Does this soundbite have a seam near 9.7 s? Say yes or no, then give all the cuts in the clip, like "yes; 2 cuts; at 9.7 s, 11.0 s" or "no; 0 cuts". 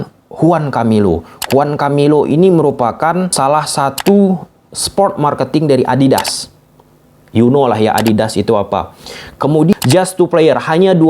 yes; 2 cuts; at 3.3 s, 9.7 s